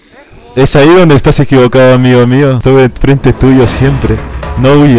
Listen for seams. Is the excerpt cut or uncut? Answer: uncut